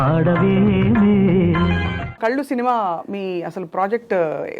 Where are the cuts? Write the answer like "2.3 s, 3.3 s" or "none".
2.1 s